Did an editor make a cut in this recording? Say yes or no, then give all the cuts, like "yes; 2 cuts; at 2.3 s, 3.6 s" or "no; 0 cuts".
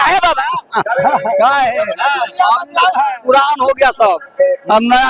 no; 0 cuts